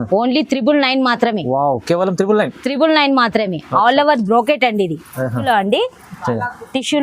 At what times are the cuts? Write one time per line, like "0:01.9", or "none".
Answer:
0:05.4